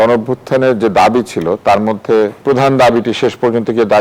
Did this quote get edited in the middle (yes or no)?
yes